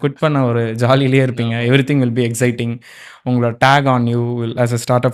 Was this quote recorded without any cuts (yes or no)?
yes